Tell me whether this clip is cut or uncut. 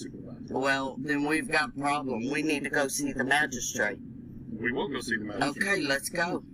uncut